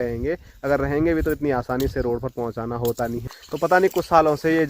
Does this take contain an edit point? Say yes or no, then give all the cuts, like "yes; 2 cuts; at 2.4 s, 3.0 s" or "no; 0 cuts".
yes; 1 cut; at 3.2 s